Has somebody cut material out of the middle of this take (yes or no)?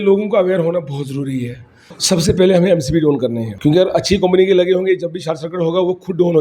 yes